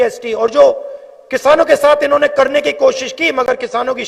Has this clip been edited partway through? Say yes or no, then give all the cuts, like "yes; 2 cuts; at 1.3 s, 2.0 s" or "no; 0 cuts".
no; 0 cuts